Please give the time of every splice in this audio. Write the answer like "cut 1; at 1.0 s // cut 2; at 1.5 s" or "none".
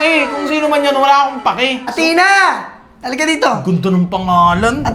cut 1; at 1.9 s

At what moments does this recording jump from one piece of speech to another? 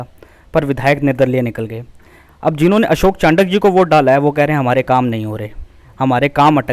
none

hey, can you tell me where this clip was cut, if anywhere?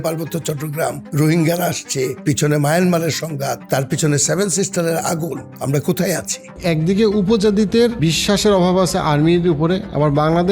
cut 1; at 1.0 s // cut 2; at 2.2 s // cut 3; at 3.6 s // cut 4; at 5.5 s // cut 5; at 6.6 s // cut 6; at 8.0 s

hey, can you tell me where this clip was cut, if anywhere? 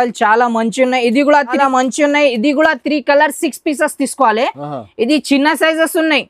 cut 1; at 1.6 s

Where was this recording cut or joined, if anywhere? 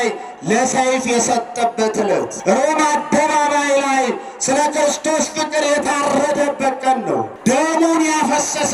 cut 1; at 2.3 s // cut 2; at 7.3 s

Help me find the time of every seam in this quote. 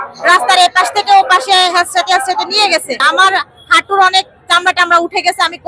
cut 1; at 3.0 s

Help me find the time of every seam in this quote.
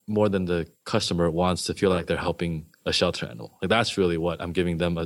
cut 1; at 2.7 s

